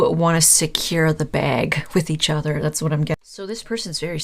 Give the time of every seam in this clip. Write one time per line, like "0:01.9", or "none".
0:03.2

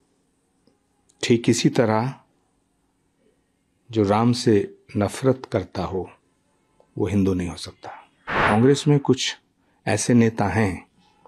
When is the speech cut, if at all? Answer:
0:08.4

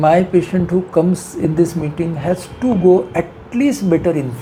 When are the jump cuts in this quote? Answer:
none

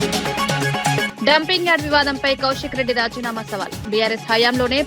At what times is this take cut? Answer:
0:01.1

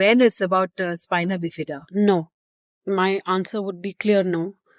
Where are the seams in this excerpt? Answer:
0:01.8

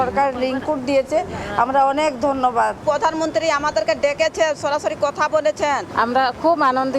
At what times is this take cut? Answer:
0:05.9

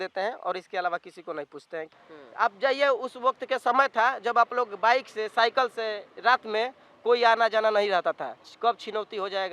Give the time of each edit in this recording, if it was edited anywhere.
0:01.9

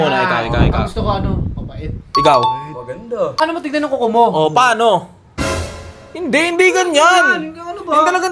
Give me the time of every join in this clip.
0:03.4

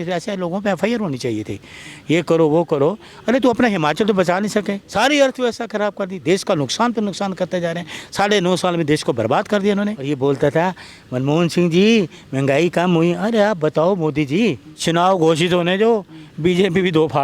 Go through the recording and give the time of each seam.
0:04.8
0:10.1
0:14.7

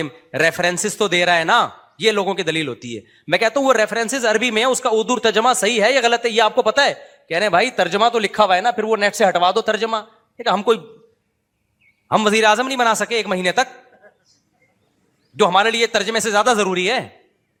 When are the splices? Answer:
none

